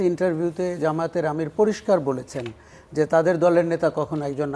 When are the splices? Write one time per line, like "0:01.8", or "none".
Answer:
none